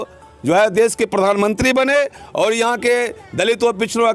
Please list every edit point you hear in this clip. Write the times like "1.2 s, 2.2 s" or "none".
none